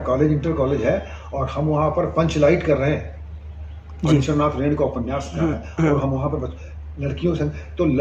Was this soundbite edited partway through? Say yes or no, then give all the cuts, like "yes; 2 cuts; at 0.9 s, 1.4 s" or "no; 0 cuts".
no; 0 cuts